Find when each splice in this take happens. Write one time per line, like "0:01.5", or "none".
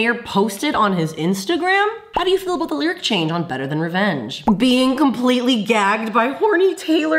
0:02.1
0:04.4